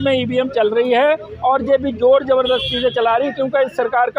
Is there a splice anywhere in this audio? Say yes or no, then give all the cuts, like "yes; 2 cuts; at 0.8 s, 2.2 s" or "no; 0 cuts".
no; 0 cuts